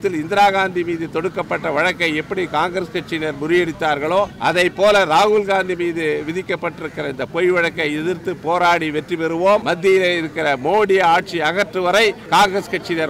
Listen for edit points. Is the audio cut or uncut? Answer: cut